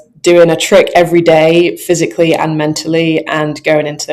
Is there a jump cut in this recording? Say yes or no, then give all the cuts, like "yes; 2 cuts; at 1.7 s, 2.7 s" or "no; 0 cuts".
no; 0 cuts